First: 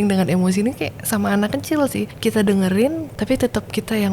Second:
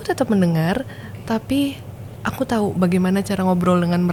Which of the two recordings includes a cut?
first; 2 cuts; at 2.1 s, 3.1 s

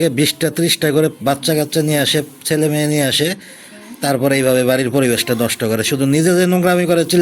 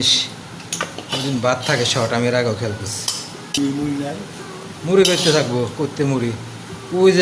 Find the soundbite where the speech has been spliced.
second; 1 cut; at 3.6 s

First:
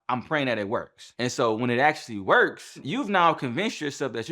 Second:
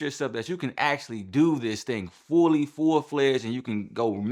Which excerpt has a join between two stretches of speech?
first; 2 cuts; at 1.0 s, 2.8 s

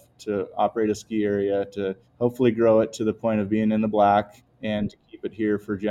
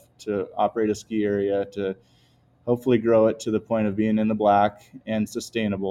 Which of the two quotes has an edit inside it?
first; 2 cuts; at 2.0 s, 4.4 s

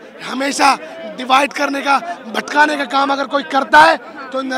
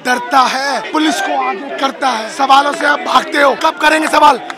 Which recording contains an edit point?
second; 3 cuts; at 0.8 s, 2.3 s, 3.6 s

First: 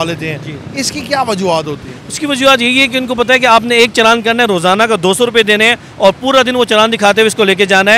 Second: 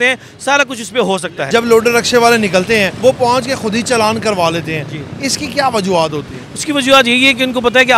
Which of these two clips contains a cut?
second; 2 cuts; at 1.5 s, 2.9 s

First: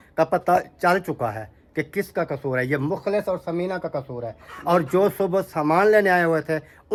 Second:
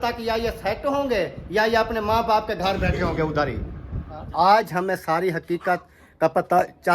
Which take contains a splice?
second; 1 cut; at 4.2 s

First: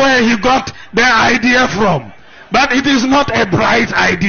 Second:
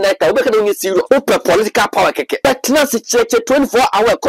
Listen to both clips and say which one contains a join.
second; 2 cuts; at 1.0 s, 2.4 s

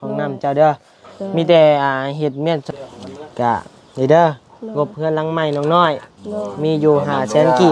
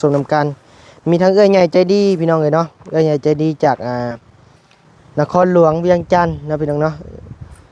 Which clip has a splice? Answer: first; 1 cut; at 2.7 s

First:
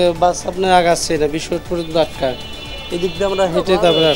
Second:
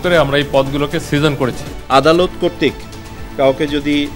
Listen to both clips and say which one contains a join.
second; 1 cut; at 1.7 s

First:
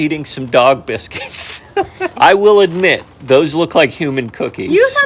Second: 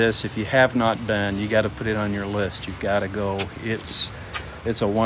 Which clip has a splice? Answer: first; 1 cut; at 2.1 s

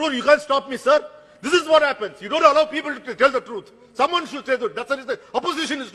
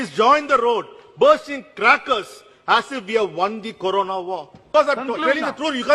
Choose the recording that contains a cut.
second; 1 cut; at 4.6 s

